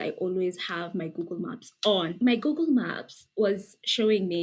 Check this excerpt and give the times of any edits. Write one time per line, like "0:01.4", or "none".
0:02.1